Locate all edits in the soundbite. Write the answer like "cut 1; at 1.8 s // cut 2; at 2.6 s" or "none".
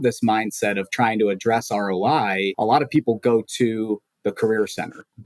cut 1; at 2.5 s